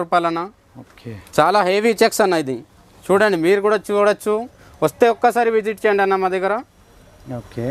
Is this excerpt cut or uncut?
uncut